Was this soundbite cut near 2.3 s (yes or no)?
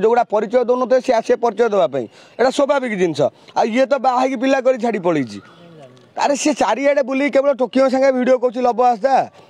no